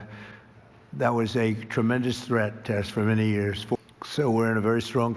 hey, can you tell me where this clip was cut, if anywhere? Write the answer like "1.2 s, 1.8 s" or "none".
3.8 s